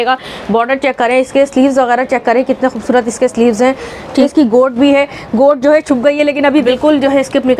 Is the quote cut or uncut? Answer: cut